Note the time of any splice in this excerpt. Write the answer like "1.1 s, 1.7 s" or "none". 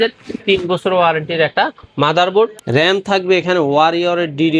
2.6 s